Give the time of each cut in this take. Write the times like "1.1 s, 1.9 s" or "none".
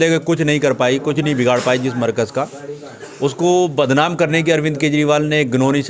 none